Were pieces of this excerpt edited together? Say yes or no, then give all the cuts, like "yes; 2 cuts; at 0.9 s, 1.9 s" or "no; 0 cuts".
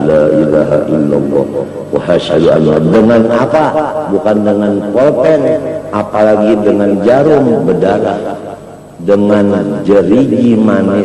no; 0 cuts